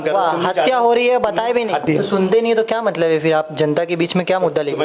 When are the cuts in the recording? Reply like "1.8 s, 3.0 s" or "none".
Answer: 1.8 s